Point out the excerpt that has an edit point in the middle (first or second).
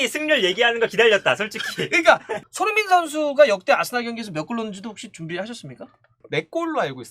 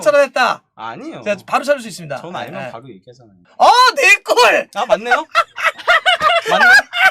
first